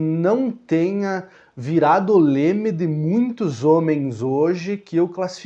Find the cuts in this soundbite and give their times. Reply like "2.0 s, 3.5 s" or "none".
none